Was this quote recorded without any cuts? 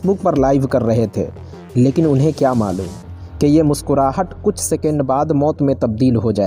yes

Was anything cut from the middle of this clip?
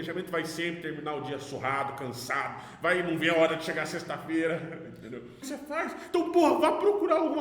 yes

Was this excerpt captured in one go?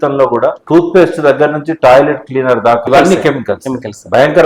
no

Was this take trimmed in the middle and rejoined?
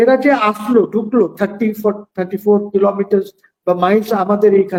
no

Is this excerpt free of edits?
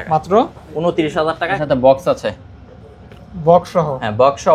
no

